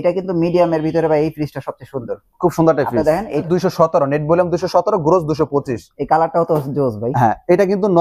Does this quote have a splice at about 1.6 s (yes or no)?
no